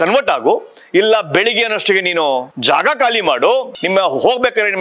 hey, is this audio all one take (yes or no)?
no